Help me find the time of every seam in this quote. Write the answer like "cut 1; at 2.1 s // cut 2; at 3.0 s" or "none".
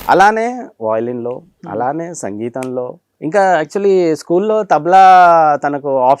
cut 1; at 3.0 s